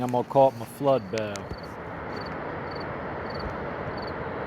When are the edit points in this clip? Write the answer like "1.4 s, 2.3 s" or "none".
1.4 s